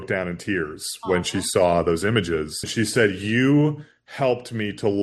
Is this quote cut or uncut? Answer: cut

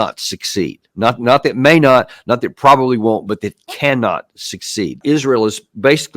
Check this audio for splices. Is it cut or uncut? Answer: cut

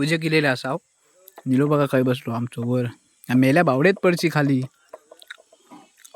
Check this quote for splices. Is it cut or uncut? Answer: uncut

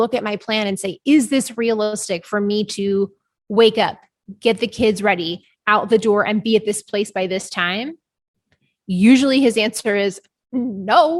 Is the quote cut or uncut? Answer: uncut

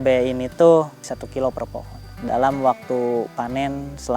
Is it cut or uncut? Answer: cut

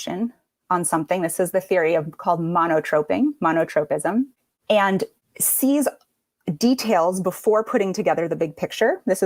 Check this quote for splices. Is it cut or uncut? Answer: uncut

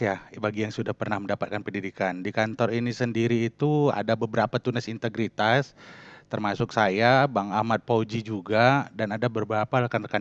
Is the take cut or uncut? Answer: uncut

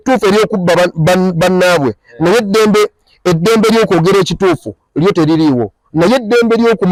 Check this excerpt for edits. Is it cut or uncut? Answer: uncut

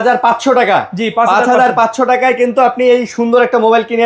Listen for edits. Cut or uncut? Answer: uncut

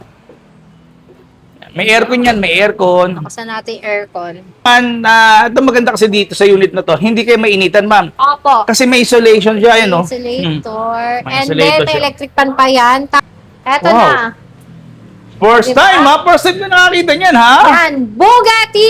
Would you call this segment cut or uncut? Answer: cut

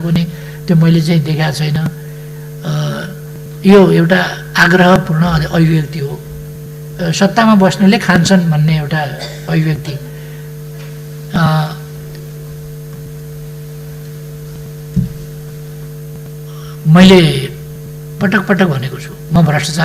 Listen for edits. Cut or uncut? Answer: uncut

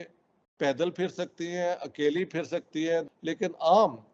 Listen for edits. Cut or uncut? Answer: cut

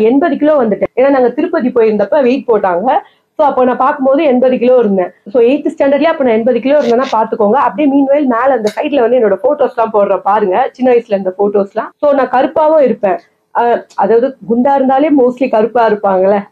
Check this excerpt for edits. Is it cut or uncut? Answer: uncut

